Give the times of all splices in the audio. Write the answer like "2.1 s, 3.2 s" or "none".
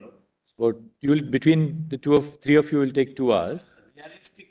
none